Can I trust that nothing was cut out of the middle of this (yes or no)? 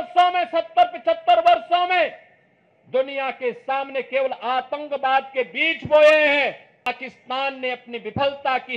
no